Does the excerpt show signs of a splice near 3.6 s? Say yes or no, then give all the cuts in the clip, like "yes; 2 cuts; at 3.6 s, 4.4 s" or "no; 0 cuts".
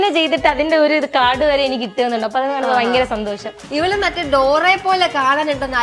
yes; 1 cut; at 3.6 s